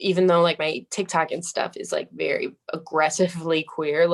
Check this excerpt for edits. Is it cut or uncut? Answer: uncut